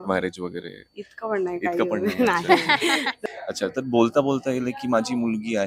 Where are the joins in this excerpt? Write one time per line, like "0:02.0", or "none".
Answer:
0:03.1